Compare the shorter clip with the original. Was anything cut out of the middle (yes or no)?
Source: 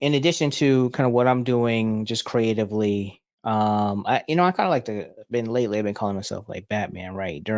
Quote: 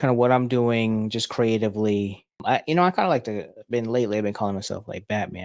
yes